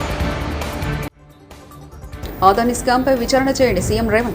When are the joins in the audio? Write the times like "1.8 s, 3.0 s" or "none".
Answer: 1.2 s